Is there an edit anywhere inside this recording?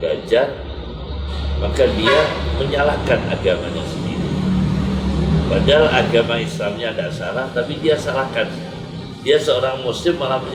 no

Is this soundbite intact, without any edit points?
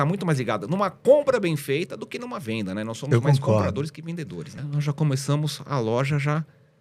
no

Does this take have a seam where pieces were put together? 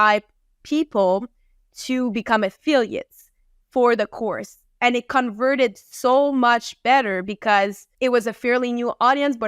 yes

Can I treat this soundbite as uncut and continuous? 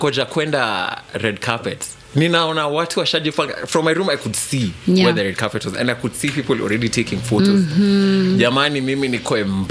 yes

